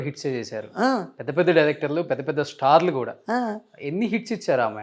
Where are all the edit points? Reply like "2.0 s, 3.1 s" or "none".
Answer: none